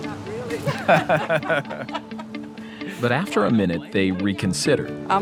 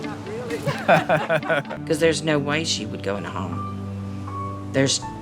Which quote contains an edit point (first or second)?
second